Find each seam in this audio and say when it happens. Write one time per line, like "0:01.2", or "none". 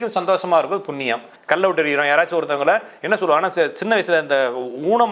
0:01.3